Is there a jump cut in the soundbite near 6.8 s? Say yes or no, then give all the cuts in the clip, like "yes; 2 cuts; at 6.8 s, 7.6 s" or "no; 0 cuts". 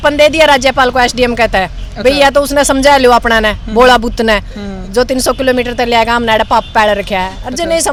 no; 0 cuts